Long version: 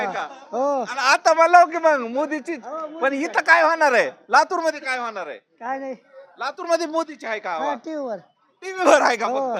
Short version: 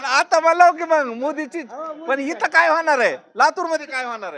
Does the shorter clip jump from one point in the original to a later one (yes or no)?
no